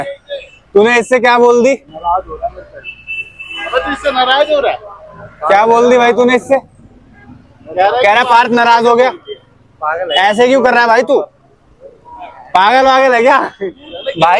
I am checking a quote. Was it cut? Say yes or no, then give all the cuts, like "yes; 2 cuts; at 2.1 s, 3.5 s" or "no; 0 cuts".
no; 0 cuts